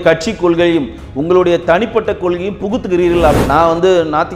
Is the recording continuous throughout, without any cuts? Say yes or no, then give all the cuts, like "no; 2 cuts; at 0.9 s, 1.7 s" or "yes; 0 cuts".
no; 1 cut; at 3.4 s